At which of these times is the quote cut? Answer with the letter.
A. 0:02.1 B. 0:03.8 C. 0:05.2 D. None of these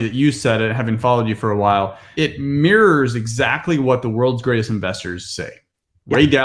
A